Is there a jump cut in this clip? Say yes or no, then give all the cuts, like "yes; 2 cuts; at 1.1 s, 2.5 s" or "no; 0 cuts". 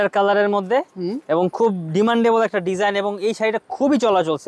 no; 0 cuts